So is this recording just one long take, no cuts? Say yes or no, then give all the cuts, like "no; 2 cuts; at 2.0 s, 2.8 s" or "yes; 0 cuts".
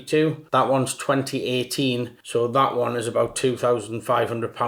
yes; 0 cuts